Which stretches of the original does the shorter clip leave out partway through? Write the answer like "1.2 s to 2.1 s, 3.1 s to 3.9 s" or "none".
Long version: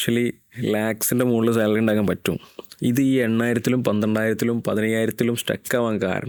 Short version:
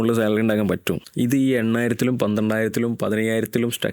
2.4 s to 2.6 s

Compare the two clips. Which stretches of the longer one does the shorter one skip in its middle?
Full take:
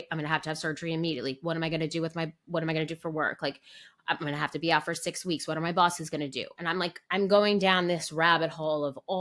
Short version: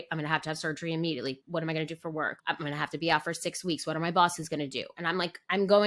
1.4 s to 2.4 s, 3.4 s to 4.0 s

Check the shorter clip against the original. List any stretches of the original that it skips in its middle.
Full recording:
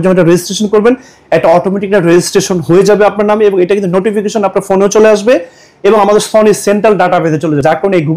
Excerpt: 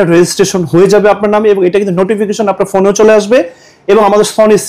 none

